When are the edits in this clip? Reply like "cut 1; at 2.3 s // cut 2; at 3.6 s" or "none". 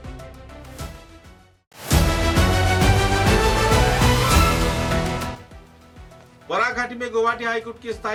none